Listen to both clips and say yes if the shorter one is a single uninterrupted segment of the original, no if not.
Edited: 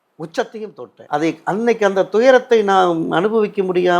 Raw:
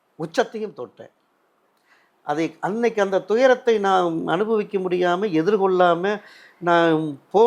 no